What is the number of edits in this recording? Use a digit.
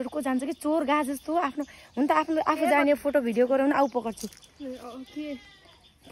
0